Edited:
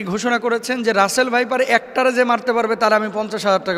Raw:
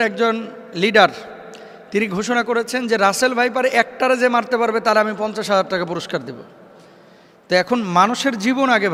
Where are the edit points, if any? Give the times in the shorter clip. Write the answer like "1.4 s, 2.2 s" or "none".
none